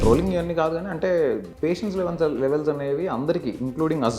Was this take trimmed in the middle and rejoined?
yes; 1 cut; at 1.5 s

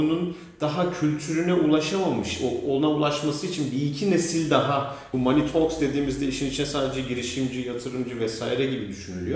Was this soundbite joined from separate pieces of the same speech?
yes; 1 cut; at 5.0 s

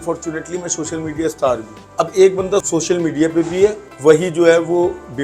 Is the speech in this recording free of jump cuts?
no; 3 cuts; at 1.8 s, 2.7 s, 3.9 s

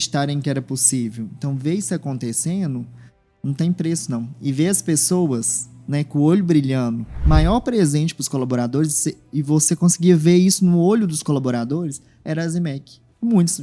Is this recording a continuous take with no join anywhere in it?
no; 1 cut; at 7.1 s

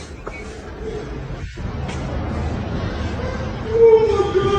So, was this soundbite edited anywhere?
yes; 1 cut; at 1.1 s

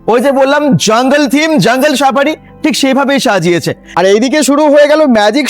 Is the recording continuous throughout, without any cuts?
no; 1 cut; at 3.9 s

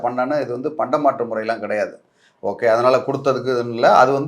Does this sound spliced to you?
no; 0 cuts

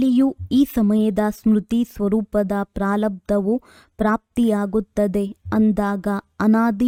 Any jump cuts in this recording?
no; 0 cuts

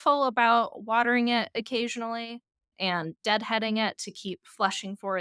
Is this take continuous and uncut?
yes; 0 cuts

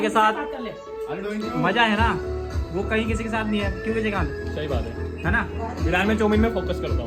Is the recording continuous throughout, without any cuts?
yes; 0 cuts

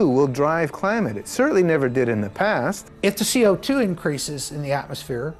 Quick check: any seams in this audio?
yes; 1 cut; at 2.9 s

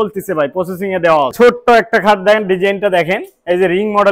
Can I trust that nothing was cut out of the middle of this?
no; 1 cut; at 1.3 s

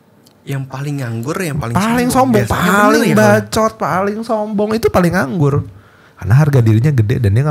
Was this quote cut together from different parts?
no; 0 cuts

